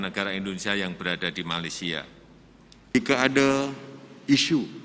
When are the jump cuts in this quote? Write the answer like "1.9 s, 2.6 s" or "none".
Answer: 2.9 s